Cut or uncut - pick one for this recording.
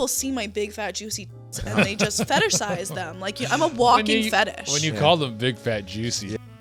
uncut